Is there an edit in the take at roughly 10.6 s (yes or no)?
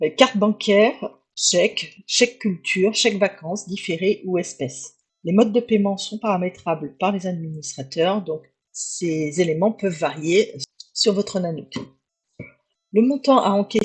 yes